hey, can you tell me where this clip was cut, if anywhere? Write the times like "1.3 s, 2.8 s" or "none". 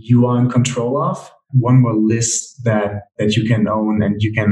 1.5 s